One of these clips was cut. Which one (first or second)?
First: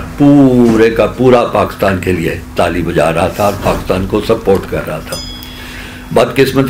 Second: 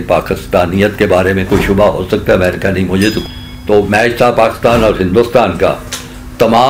second